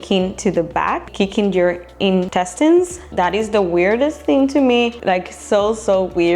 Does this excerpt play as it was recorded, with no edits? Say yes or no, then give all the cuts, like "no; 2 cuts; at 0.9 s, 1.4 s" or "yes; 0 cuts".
no; 4 cuts; at 1.1 s, 2.3 s, 3.1 s, 4.9 s